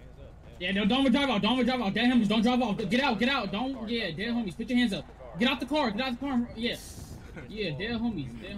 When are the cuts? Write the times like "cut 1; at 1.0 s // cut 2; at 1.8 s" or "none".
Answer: none